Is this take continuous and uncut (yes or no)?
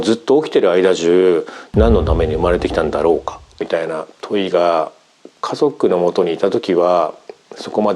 no